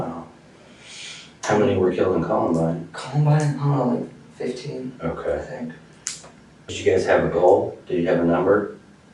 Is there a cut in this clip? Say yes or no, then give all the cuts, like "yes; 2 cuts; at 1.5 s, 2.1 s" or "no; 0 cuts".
yes; 1 cut; at 6.7 s